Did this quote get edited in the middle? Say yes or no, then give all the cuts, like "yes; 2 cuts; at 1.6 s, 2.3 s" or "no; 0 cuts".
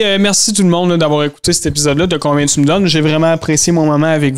no; 0 cuts